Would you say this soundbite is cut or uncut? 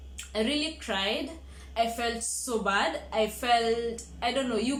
uncut